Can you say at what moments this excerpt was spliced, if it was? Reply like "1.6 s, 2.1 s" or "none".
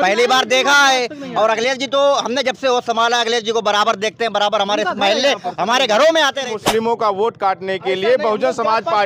6.4 s